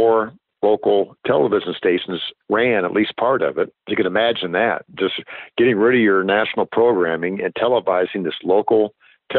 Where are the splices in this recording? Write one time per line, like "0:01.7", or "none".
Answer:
0:03.8